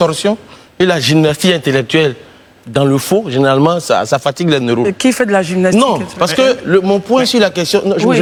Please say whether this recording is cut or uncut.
uncut